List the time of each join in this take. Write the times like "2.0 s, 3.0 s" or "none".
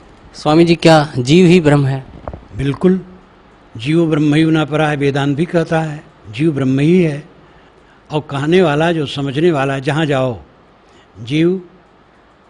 none